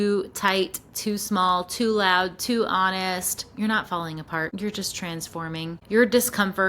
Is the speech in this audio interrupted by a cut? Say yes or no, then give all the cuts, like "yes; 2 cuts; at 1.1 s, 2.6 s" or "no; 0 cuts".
yes; 2 cuts; at 4.5 s, 5.8 s